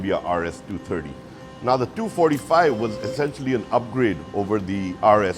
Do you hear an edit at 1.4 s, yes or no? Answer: yes